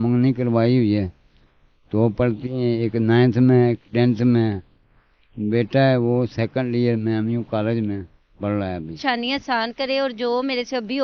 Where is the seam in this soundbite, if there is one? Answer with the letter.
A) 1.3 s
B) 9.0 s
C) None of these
B